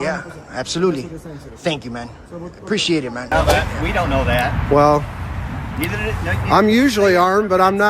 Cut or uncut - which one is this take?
cut